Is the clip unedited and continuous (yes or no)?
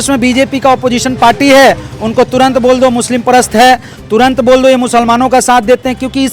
yes